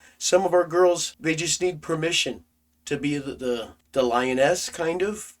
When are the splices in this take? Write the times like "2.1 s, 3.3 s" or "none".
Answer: 1.1 s, 3.8 s